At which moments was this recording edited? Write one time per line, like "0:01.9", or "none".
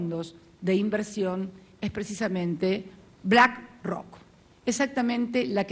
none